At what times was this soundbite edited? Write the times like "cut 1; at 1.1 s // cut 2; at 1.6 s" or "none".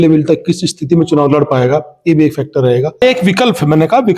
cut 1; at 3.0 s